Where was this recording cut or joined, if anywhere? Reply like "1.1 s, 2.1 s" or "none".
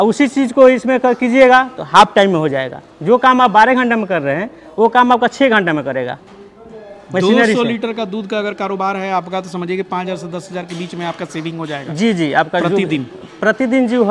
none